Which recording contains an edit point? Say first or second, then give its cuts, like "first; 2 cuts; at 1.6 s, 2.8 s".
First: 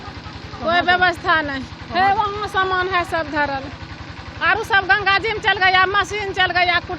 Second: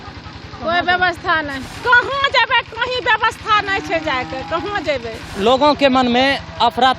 second; 2 cuts; at 1.7 s, 5.2 s